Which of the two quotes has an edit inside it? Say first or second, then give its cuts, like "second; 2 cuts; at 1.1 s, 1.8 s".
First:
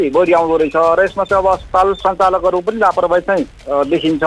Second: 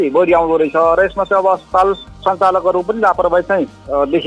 first; 1 cut; at 2.0 s